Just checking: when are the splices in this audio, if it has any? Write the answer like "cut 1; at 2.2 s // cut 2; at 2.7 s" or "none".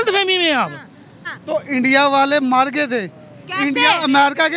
cut 1; at 1.2 s

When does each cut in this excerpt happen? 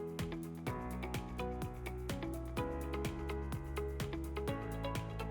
none

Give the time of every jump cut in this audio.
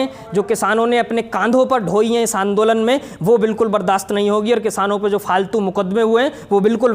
none

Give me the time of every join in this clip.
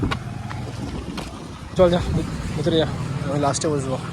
cut 1; at 1.7 s

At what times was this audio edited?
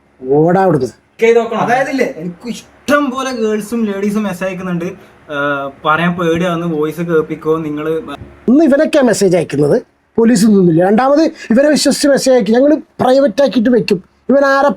cut 1; at 1.1 s // cut 2; at 8.5 s

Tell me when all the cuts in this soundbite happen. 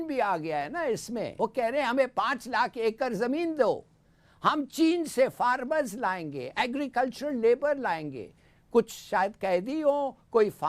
cut 1; at 1.3 s

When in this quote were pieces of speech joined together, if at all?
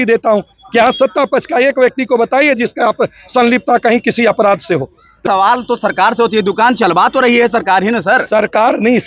cut 1; at 5.2 s

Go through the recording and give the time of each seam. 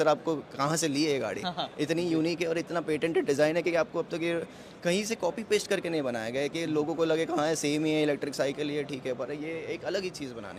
none

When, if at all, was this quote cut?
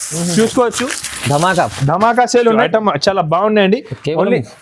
cut 1; at 2.6 s

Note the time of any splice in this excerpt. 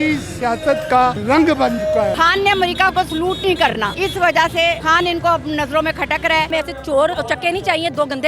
cut 1; at 1.2 s // cut 2; at 2.1 s // cut 3; at 3.9 s // cut 4; at 4.8 s // cut 5; at 6.5 s // cut 6; at 7.1 s

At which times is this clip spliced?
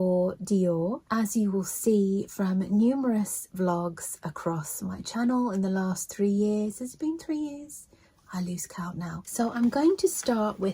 cut 1; at 9.2 s

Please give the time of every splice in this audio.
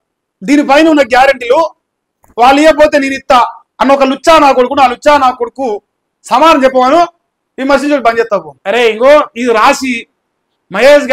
cut 1; at 8.5 s

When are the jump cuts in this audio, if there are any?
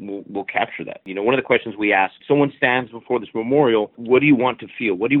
cut 1; at 1.0 s // cut 2; at 2.2 s // cut 3; at 4.0 s

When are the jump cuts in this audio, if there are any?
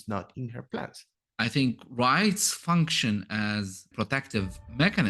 cut 1; at 1.2 s // cut 2; at 3.9 s

